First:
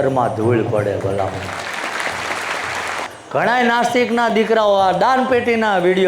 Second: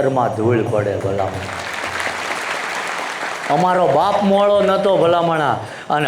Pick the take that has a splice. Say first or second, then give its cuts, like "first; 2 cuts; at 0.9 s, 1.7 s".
first; 1 cut; at 3.1 s